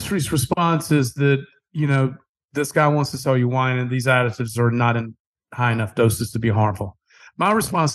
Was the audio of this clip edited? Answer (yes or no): no